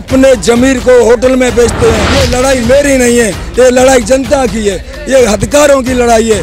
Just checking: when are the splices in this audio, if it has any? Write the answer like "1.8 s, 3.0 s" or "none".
2.1 s